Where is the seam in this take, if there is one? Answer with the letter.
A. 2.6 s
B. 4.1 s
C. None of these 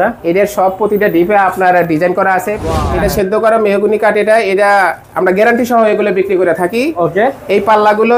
A